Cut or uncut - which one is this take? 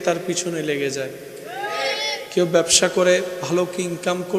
uncut